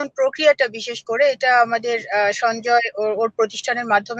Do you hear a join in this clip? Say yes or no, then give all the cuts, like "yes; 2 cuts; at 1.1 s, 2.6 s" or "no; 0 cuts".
no; 0 cuts